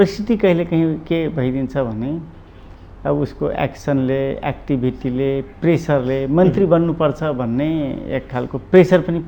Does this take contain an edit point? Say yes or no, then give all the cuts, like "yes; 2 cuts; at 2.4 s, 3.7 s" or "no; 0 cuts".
no; 0 cuts